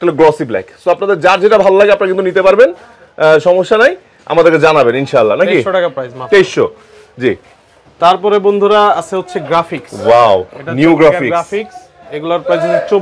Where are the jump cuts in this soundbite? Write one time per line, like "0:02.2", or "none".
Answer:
none